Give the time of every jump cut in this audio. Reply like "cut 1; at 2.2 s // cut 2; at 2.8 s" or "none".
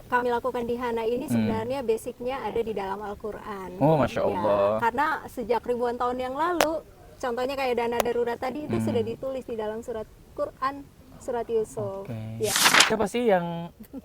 cut 1; at 12.6 s